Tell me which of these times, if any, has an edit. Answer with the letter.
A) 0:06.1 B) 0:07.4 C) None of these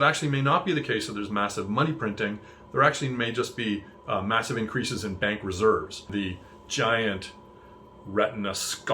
A